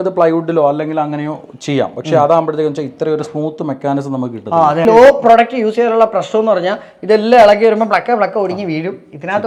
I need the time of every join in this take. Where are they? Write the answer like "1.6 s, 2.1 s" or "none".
none